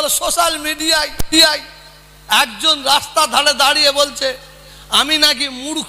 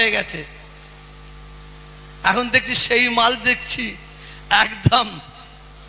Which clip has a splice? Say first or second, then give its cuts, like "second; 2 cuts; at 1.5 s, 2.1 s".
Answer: first; 1 cut; at 1.2 s